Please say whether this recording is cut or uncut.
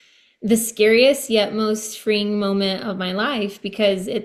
uncut